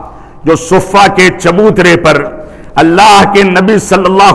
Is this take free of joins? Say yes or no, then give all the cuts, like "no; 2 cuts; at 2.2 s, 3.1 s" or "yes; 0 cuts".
yes; 0 cuts